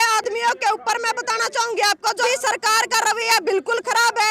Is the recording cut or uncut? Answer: cut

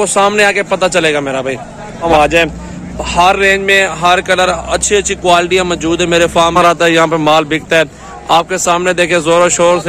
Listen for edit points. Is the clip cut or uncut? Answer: cut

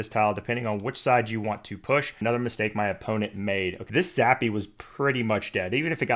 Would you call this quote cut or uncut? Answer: cut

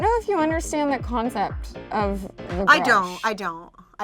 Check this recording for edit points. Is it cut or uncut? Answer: uncut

